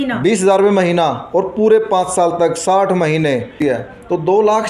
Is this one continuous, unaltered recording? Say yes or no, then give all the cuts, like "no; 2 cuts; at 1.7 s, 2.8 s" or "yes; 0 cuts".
no; 1 cut; at 3.5 s